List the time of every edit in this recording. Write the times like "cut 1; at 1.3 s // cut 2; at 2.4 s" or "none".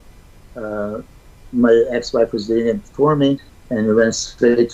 cut 1; at 3.6 s